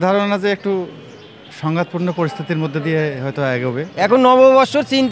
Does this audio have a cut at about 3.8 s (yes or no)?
yes